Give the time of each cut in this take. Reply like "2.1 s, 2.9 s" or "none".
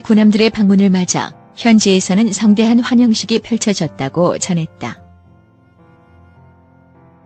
5.7 s